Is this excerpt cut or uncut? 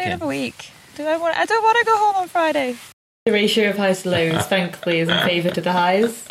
cut